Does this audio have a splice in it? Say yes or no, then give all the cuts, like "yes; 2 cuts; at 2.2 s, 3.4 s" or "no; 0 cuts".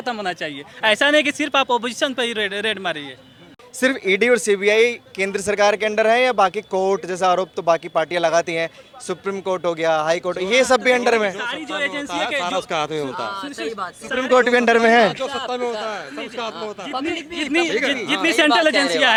no; 0 cuts